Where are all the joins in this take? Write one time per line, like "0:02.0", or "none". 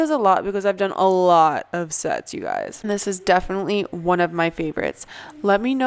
none